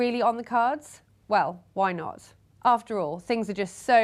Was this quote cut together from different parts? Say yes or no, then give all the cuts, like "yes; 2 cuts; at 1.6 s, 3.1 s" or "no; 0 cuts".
no; 0 cuts